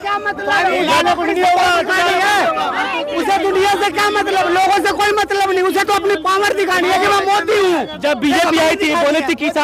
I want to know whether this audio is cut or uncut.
uncut